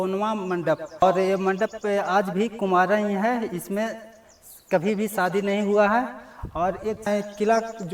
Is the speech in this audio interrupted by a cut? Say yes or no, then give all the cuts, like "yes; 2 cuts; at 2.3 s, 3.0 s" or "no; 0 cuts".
no; 0 cuts